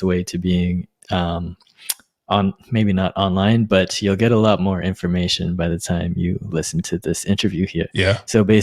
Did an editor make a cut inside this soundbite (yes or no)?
no